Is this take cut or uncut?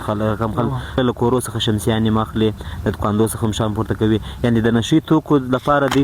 cut